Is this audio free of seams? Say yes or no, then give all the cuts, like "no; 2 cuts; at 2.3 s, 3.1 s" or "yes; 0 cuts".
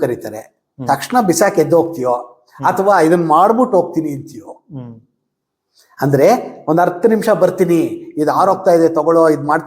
yes; 0 cuts